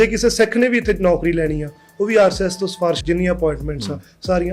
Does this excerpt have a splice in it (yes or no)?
yes